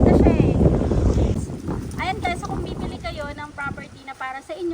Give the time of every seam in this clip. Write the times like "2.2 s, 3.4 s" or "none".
1.4 s